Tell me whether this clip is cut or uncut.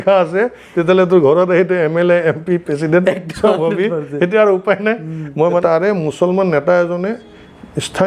cut